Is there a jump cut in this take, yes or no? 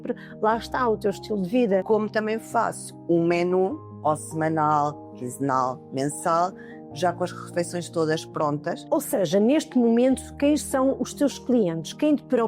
yes